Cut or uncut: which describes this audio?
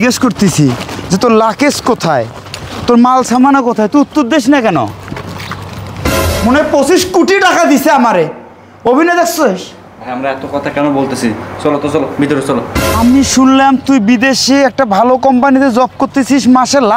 cut